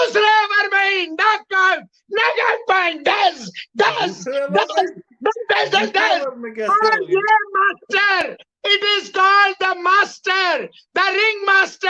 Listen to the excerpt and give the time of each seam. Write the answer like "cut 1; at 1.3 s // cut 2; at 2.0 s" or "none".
none